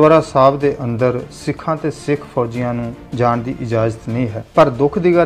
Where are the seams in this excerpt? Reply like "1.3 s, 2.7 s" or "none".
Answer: 3.0 s, 4.4 s

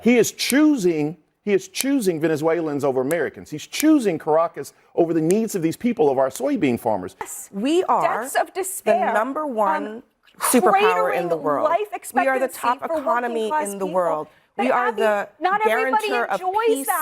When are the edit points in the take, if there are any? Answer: 7.3 s

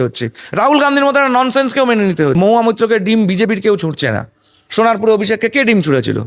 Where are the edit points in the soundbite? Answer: 2.3 s

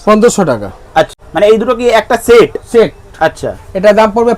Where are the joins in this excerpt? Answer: 1.2 s

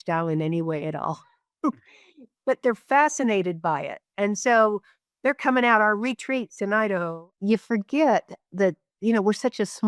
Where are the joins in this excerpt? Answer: 7.2 s

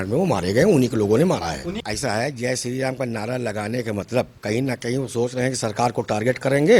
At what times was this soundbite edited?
1.7 s

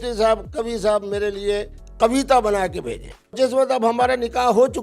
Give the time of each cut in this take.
3.4 s

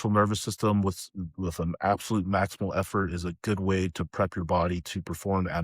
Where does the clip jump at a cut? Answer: none

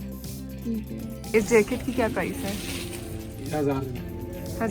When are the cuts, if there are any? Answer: 1.3 s

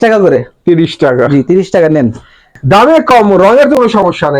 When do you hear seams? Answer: 2.6 s

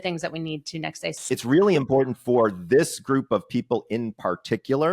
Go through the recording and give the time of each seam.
1.1 s

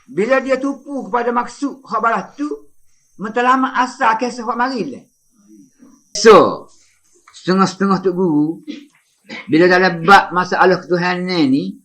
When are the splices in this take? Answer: 6.2 s

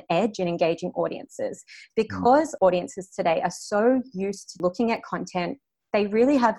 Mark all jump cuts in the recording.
4.5 s

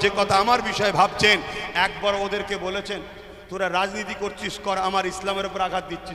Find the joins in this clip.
none

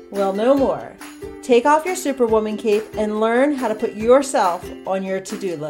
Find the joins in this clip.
none

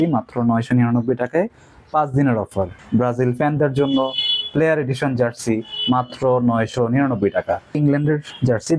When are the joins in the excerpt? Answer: 2.8 s, 7.8 s

